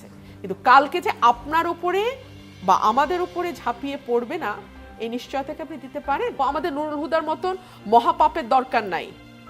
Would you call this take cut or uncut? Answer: cut